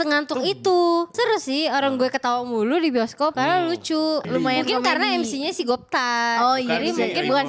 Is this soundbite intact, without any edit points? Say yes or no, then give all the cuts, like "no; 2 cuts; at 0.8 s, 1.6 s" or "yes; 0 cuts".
no; 3 cuts; at 1.1 s, 3.3 s, 4.2 s